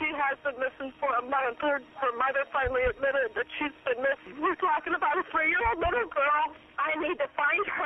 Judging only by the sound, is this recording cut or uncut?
cut